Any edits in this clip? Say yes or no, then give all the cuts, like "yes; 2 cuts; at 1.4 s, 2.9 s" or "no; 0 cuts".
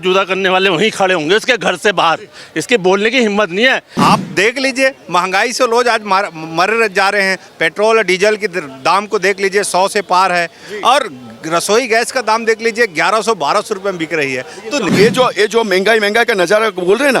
yes; 2 cuts; at 3.9 s, 14.9 s